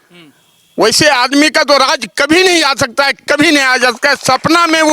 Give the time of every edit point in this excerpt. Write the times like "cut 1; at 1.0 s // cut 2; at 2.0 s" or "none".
none